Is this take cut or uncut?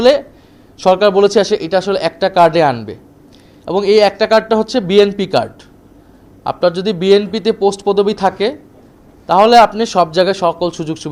uncut